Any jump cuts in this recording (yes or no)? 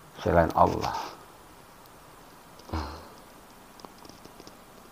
yes